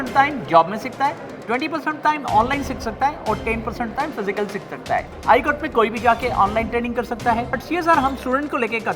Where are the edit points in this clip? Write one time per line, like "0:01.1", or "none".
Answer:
0:05.1
0:07.6